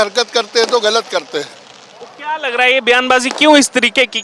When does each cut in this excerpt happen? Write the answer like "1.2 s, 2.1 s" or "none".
none

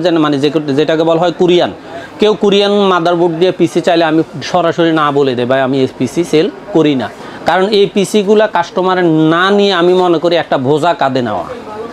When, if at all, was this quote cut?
none

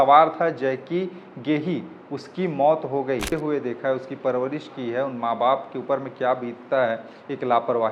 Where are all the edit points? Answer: 3.3 s

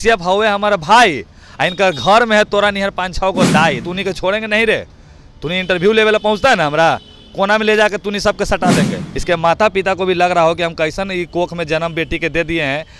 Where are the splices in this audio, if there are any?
3.8 s, 9.1 s

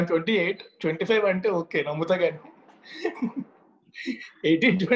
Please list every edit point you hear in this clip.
none

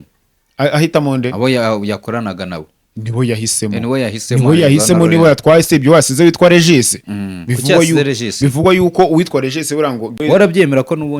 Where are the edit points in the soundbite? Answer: 10.2 s

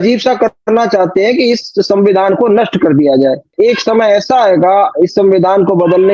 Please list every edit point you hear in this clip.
3.5 s

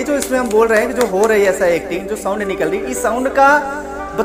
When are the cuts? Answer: none

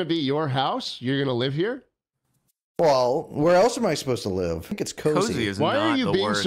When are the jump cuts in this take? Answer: 4.8 s

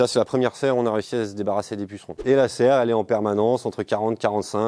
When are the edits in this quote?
2.2 s

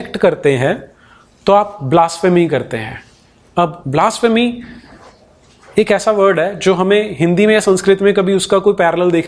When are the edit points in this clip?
none

